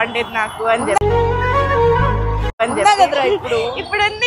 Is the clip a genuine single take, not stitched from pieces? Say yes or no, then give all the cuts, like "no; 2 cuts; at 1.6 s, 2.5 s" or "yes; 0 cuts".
no; 1 cut; at 1.0 s